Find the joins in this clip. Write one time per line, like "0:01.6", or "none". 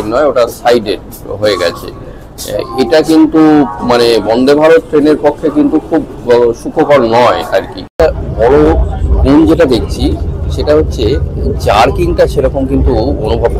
0:07.9

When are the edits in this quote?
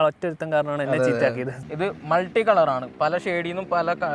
0:01.5

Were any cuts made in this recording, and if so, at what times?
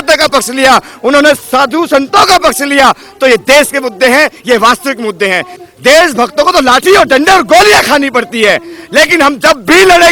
0:05.5

